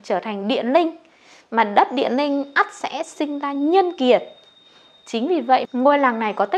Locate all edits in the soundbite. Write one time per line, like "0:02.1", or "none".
0:05.7

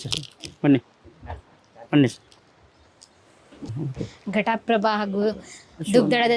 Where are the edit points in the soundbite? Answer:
0:03.7

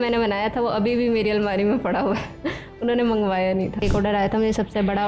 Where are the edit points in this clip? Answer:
0:03.8

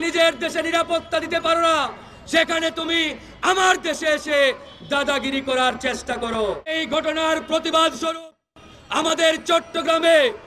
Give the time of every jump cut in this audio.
0:06.8

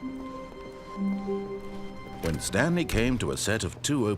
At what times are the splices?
0:02.2

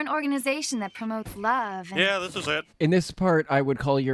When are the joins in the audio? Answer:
none

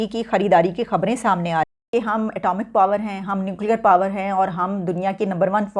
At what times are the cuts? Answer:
0:01.8

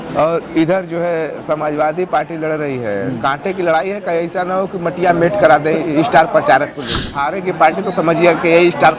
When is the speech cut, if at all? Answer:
0:07.0

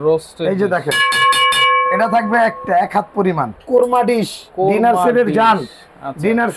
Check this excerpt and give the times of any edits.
0:03.6

